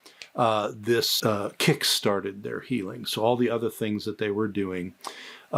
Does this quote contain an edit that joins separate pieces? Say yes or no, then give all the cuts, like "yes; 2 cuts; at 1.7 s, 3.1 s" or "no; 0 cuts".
no; 0 cuts